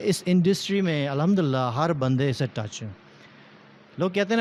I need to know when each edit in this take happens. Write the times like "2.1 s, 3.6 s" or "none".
none